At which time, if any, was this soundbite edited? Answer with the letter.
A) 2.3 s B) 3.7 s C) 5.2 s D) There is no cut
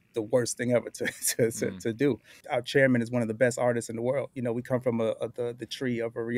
A